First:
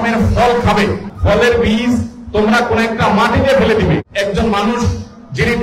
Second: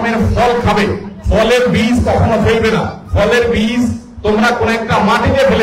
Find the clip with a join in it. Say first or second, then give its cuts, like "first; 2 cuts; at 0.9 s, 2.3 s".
first; 2 cuts; at 1.1 s, 4.0 s